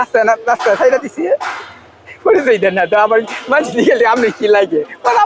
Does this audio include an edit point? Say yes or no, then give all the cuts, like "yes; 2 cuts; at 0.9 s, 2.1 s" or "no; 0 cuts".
no; 0 cuts